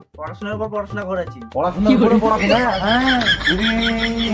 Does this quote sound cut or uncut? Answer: uncut